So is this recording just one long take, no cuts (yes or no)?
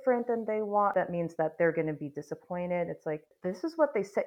no